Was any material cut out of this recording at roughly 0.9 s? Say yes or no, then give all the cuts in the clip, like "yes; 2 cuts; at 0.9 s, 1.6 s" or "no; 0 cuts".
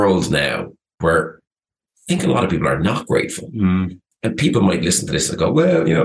yes; 1 cut; at 0.9 s